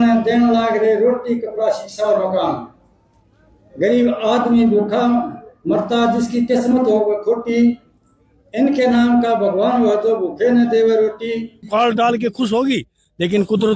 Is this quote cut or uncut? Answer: cut